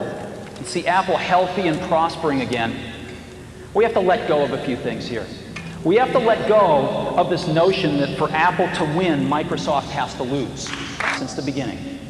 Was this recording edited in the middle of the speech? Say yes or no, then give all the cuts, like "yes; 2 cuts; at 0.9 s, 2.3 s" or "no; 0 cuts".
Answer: yes; 1 cut; at 11.2 s